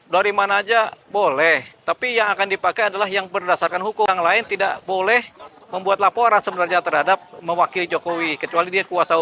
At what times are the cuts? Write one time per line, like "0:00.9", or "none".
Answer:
0:04.1

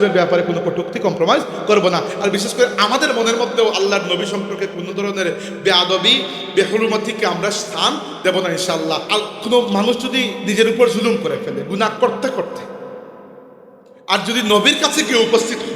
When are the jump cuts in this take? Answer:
0:09.1

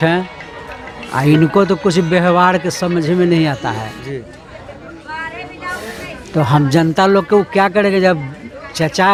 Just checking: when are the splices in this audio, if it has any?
none

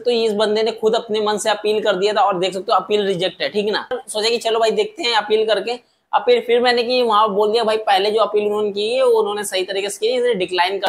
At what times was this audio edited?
0:04.0

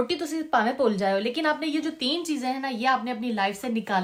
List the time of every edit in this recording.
none

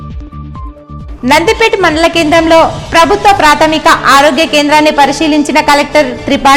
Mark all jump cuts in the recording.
0:01.0

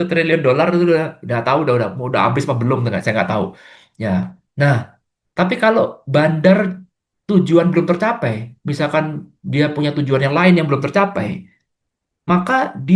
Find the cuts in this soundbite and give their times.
none

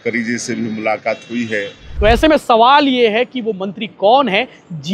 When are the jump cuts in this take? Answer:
0:01.9

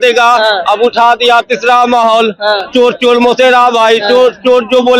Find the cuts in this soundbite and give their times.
none

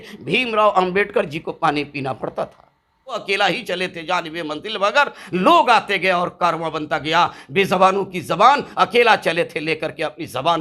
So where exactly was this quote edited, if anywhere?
0:03.1

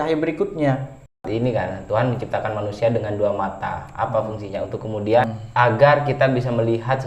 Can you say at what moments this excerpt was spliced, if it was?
0:01.2
0:05.4

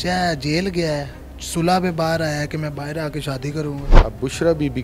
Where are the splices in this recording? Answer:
0:03.9

